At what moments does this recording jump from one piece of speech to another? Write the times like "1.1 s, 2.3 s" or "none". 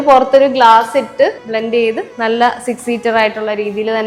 1.7 s